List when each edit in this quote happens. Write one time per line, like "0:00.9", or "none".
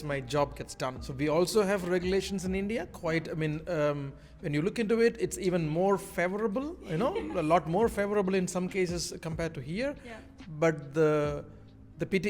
0:01.0

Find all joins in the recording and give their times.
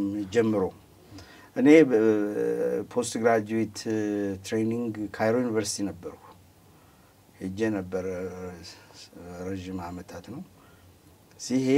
none

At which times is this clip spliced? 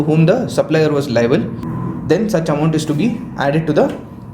0:01.6

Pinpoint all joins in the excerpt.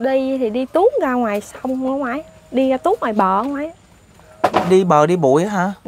none

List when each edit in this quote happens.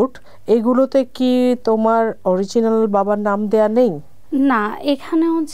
none

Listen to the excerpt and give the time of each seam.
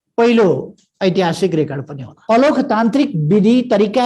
0:02.1

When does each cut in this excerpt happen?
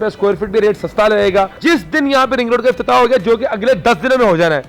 0:01.6

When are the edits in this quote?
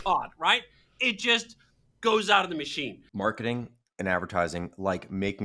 0:03.0

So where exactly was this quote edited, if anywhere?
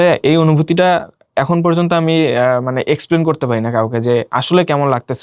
none

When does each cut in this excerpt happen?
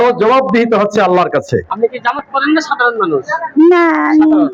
0:01.7

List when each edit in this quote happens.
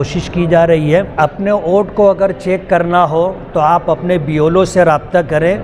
0:01.1

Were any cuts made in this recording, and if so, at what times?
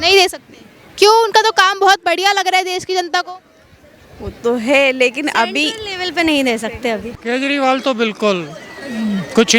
0:07.1

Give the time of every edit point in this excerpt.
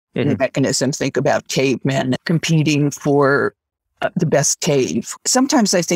0:02.2
0:05.1

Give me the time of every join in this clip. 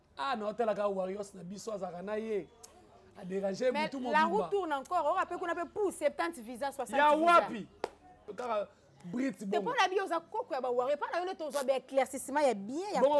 0:08.3

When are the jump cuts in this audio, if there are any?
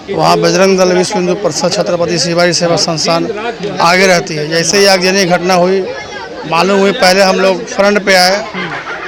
none

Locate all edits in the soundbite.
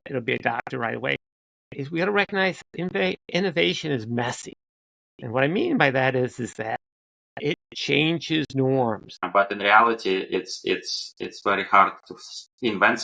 0:09.1

